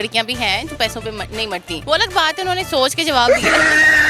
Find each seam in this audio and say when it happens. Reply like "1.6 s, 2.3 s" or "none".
1.7 s